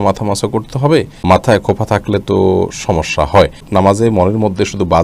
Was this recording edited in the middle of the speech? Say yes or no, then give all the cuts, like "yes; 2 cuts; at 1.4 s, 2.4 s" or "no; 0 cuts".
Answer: yes; 2 cuts; at 1.1 s, 3.6 s